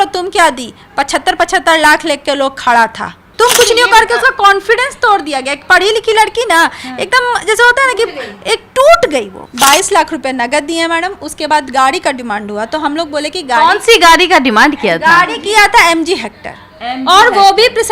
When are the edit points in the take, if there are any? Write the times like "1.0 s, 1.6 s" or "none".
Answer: 3.2 s, 9.4 s